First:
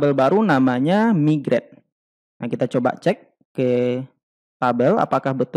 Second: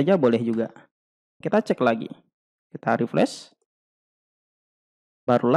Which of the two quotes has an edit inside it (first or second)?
second